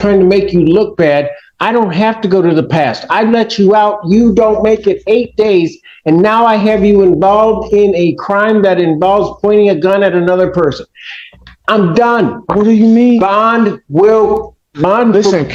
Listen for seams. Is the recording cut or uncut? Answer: uncut